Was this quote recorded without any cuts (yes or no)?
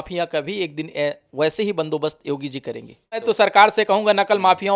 no